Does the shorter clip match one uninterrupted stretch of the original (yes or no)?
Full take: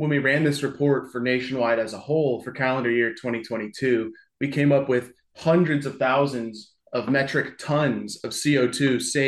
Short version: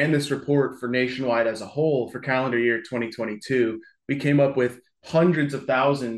yes